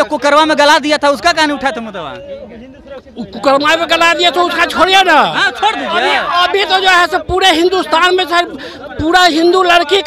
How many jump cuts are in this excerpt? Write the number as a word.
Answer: zero